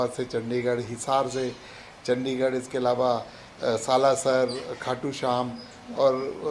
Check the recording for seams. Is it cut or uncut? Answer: uncut